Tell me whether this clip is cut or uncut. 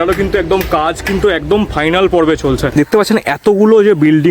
cut